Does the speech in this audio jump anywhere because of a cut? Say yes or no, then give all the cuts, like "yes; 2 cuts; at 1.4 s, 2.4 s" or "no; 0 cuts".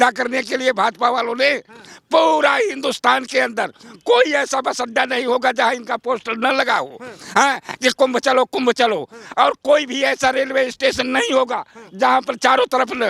no; 0 cuts